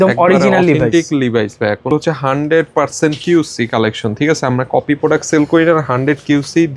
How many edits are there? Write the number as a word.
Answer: one